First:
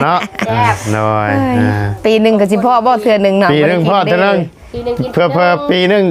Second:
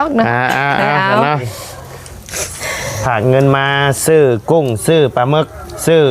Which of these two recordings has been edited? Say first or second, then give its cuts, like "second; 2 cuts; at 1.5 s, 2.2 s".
second; 1 cut; at 1.5 s